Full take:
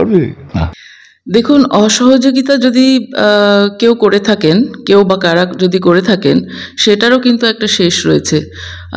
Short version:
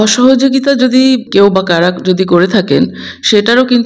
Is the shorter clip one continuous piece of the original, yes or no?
no